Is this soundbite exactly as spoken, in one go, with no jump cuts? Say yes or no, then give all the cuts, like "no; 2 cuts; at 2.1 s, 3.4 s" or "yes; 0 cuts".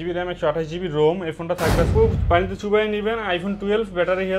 no; 1 cut; at 1.9 s